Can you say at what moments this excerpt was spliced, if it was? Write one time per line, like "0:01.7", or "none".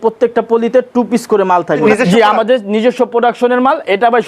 0:01.9

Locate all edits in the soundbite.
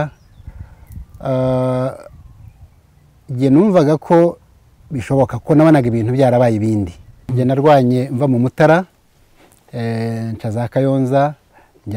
0:07.2

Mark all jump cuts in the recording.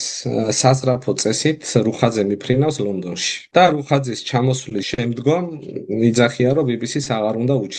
0:03.5
0:04.9

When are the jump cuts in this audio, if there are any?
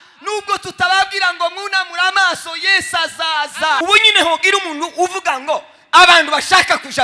0:03.8

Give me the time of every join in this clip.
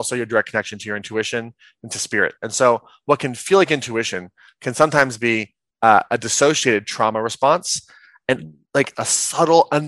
none

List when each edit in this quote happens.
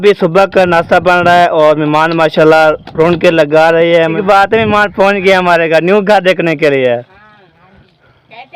0:04.2

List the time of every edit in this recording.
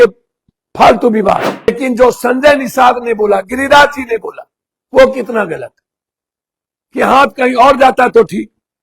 0:01.7

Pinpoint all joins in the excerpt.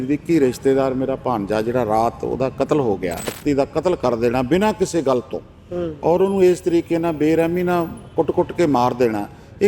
0:03.3

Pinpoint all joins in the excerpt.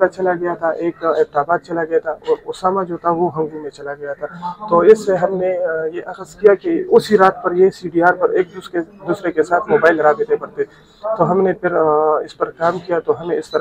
none

